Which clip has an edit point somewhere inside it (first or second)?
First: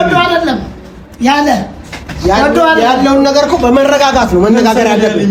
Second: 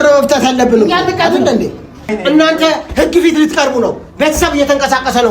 second